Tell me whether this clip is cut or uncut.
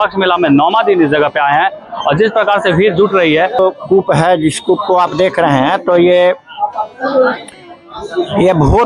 cut